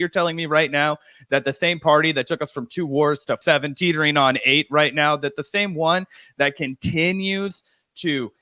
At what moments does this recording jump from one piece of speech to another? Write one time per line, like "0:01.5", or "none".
0:03.4